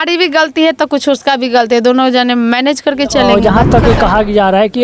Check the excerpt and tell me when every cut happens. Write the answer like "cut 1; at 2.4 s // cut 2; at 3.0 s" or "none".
cut 1; at 3.3 s